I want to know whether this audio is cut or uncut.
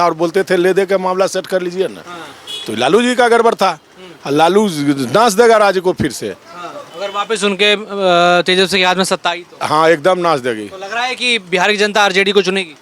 uncut